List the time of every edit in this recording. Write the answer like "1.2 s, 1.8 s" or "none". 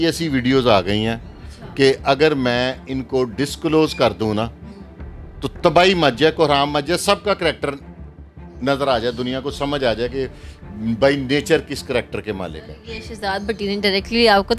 none